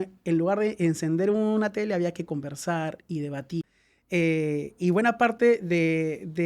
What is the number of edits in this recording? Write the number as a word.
one